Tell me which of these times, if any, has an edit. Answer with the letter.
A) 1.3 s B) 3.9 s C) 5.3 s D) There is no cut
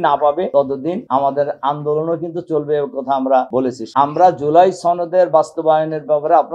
B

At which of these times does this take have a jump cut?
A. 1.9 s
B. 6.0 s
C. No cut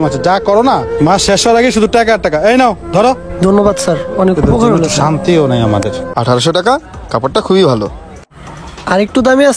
B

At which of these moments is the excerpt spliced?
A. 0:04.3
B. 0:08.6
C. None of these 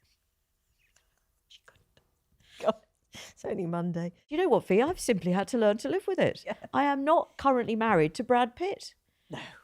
A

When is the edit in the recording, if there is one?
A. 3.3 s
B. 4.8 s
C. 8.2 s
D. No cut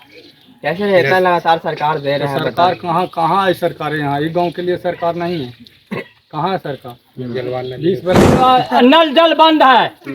C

